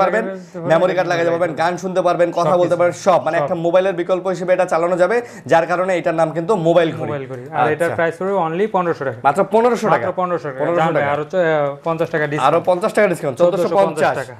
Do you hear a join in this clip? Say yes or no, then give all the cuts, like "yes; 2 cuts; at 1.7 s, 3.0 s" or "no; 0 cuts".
no; 0 cuts